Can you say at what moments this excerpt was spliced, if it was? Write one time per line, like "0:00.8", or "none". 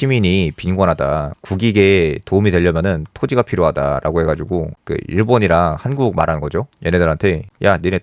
0:01.4
0:04.8